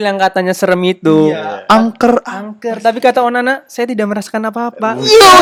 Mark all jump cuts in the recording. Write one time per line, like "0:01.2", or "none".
none